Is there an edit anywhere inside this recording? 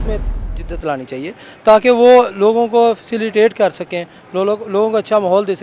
no; 0 cuts

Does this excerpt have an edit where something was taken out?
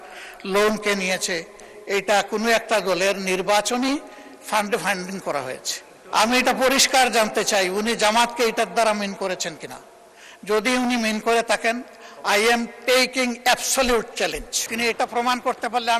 yes; 2 cuts; at 5.9 s, 14.6 s

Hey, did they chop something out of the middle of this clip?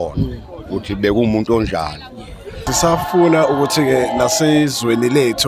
yes; 1 cut; at 2.7 s

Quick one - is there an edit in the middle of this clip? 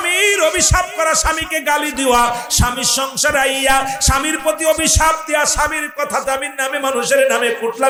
no; 0 cuts

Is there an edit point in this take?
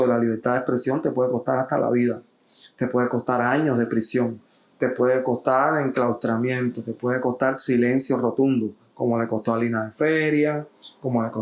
no; 0 cuts

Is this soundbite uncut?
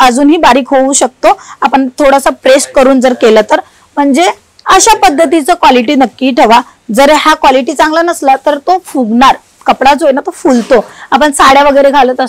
yes; 0 cuts

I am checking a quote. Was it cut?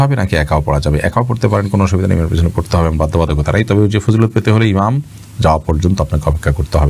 no; 0 cuts

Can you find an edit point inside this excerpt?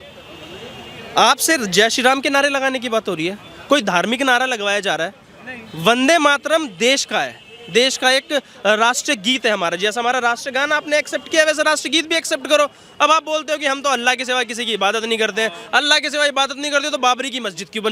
no; 0 cuts

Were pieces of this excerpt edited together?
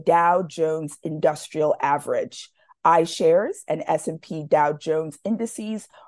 no; 0 cuts

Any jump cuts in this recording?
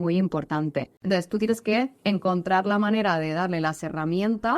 yes; 1 cut; at 0.9 s

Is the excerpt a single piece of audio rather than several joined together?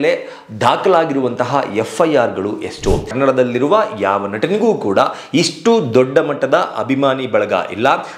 no; 1 cut; at 3.1 s

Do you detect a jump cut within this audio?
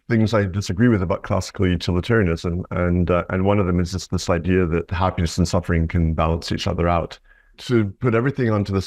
yes; 2 cuts; at 4.9 s, 7.6 s

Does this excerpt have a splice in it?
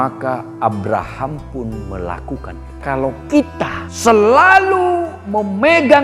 yes; 2 cuts; at 2.8 s, 3.8 s

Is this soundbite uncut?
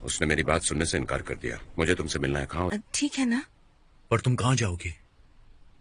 no; 1 cut; at 2.7 s

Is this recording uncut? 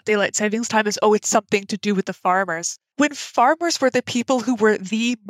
yes; 0 cuts

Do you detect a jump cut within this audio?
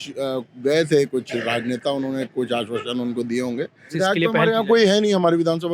yes; 1 cut; at 3.9 s

